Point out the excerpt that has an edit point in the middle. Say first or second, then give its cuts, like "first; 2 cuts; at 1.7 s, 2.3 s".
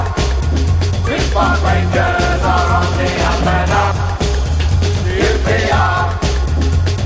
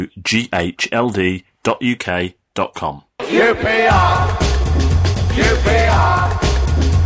second; 1 cut; at 3.1 s